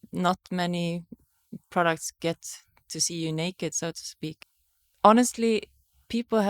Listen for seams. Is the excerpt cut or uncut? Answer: cut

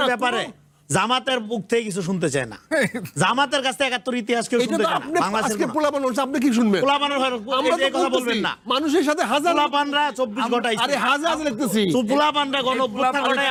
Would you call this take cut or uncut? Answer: uncut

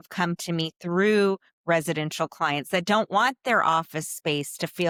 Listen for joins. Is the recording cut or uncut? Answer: uncut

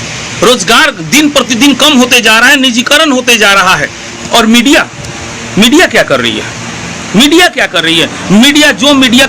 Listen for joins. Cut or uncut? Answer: cut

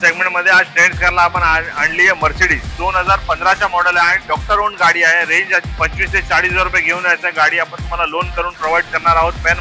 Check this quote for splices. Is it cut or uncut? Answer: cut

